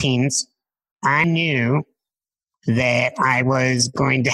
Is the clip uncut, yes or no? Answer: no